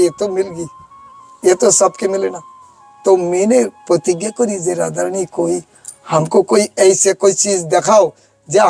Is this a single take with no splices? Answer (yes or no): yes